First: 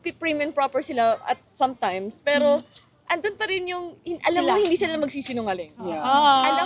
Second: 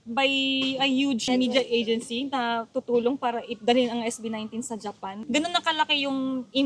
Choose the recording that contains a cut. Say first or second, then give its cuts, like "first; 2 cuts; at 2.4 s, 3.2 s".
second; 2 cuts; at 1.2 s, 5.1 s